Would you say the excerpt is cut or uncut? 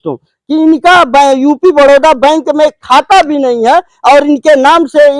uncut